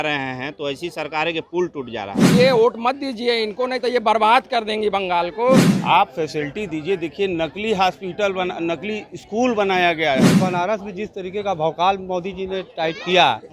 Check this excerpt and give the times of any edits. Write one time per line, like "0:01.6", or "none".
0:02.3
0:05.7
0:10.3